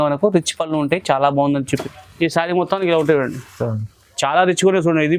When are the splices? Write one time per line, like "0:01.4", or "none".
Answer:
0:01.9

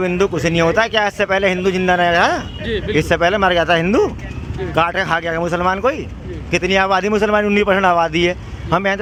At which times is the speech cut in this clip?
none

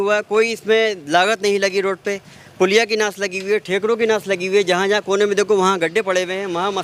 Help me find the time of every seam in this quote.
none

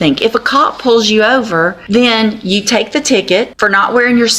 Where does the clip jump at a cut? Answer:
0:01.8
0:03.5

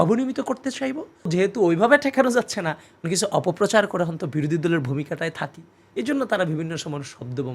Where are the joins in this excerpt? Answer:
0:01.3

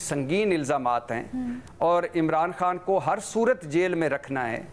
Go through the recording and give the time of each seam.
none

